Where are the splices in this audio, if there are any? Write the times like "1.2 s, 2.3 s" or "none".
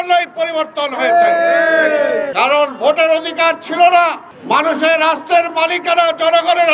2.3 s, 4.3 s